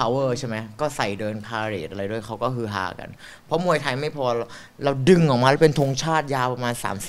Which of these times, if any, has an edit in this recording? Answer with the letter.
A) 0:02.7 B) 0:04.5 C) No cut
C